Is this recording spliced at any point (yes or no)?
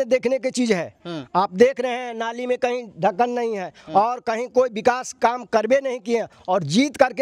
no